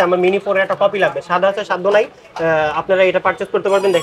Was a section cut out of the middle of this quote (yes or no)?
no